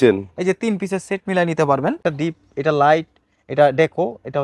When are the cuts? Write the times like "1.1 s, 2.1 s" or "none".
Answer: 2.0 s